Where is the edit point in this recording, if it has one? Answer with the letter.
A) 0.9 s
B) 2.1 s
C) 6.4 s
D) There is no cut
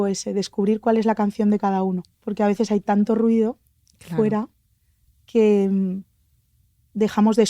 B